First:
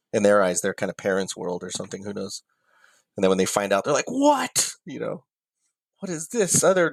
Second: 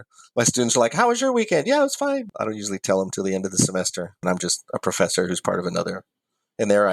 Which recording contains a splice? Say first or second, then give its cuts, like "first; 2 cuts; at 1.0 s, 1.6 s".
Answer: second; 2 cuts; at 2.3 s, 4.2 s